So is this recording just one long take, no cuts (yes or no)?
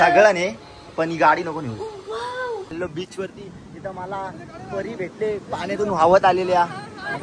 no